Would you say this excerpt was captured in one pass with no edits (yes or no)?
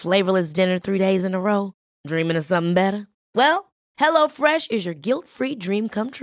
yes